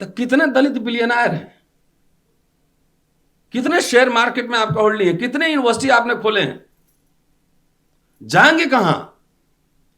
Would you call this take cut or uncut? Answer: uncut